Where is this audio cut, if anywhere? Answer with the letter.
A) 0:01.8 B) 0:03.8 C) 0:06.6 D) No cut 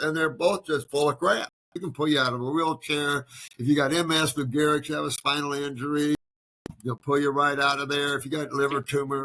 A